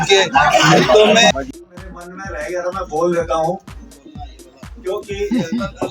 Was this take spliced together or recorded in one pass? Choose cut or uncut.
cut